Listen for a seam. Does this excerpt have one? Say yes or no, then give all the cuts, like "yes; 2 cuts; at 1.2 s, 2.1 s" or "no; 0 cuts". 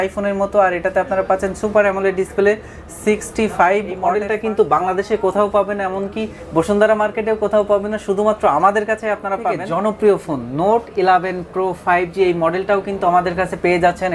yes; 2 cuts; at 4.1 s, 9.6 s